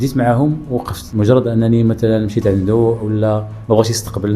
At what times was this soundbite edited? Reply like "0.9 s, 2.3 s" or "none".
1.0 s